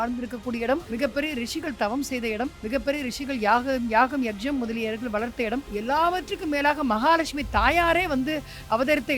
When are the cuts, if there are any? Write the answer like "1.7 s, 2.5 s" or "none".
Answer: 0.9 s, 2.6 s, 5.7 s